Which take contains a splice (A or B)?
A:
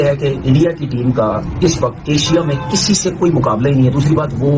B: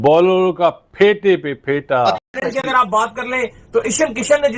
B